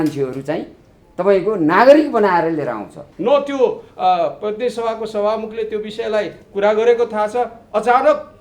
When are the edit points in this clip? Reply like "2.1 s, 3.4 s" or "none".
3.0 s